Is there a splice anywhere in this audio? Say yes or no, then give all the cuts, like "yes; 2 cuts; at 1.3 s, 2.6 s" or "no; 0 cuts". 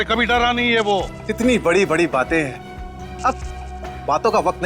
yes; 1 cut; at 1.2 s